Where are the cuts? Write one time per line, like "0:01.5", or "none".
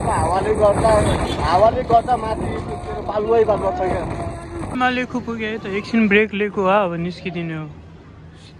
0:04.7